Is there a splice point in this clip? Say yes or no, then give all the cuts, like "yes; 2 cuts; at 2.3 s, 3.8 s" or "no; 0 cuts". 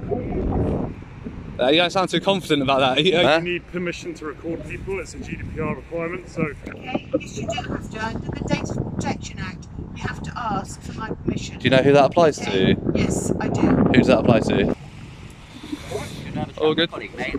yes; 3 cuts; at 3.2 s, 6.7 s, 14.7 s